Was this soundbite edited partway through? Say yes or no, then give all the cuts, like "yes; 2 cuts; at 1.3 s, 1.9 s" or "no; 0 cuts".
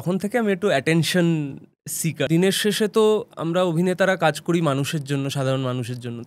yes; 1 cut; at 2.2 s